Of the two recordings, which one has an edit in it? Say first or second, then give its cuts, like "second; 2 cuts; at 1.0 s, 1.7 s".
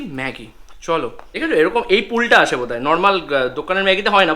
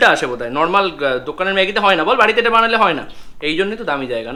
first; 1 cut; at 1.4 s